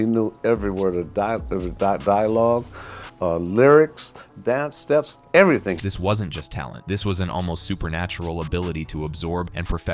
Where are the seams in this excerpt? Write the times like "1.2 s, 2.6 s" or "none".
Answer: none